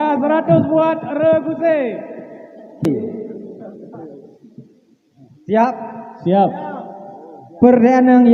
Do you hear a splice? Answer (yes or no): yes